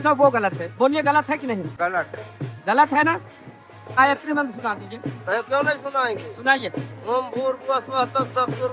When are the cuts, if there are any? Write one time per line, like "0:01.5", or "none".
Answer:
0:01.7
0:03.8